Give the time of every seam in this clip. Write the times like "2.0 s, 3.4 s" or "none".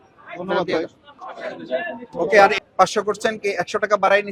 2.5 s